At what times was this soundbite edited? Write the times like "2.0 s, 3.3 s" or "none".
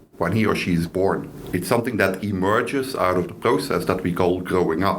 1.4 s